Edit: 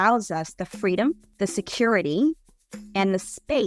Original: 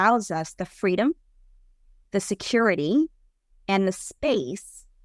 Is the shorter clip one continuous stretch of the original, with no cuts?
no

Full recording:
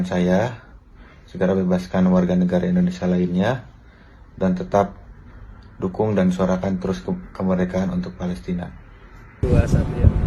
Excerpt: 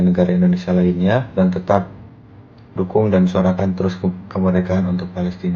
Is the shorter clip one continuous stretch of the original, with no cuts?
no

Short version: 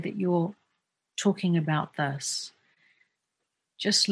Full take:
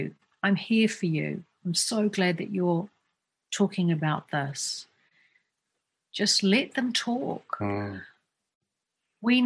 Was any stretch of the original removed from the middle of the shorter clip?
no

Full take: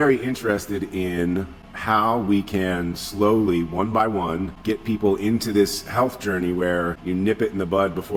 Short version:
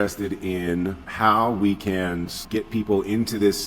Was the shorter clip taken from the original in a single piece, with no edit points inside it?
no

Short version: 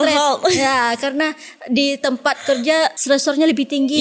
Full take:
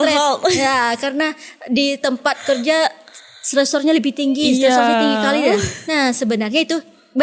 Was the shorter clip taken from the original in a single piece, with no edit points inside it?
no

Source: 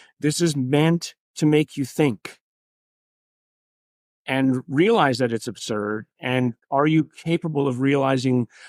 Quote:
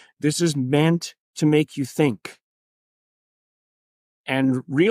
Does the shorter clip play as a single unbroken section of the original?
yes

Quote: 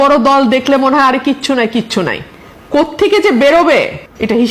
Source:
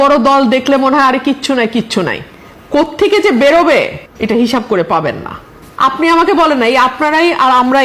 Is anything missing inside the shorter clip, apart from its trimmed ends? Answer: no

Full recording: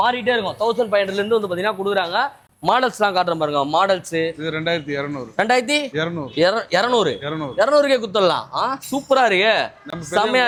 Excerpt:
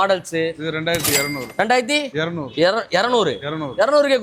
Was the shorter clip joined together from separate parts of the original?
no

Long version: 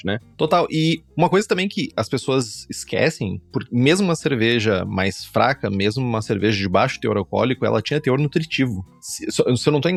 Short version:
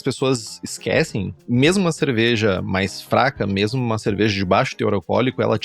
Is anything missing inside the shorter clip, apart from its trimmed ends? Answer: yes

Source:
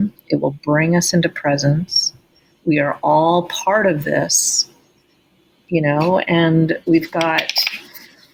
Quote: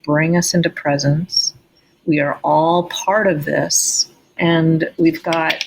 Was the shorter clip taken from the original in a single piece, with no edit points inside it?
no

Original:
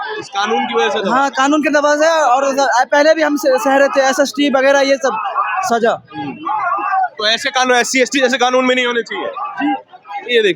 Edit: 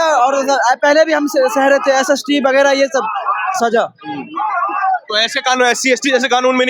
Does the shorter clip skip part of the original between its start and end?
no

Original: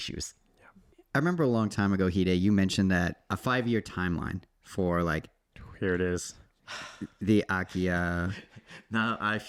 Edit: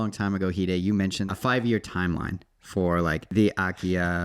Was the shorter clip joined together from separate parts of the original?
yes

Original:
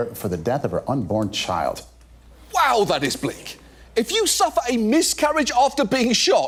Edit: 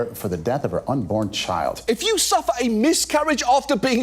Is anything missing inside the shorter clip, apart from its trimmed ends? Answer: yes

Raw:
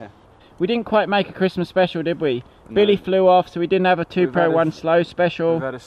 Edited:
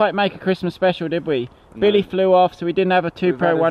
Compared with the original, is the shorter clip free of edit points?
yes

